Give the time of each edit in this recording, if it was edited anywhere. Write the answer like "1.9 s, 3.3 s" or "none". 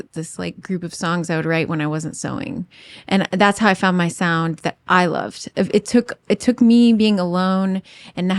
none